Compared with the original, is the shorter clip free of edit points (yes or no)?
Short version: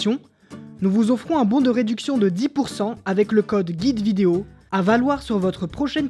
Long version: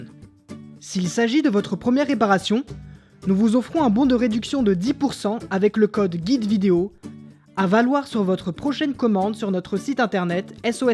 no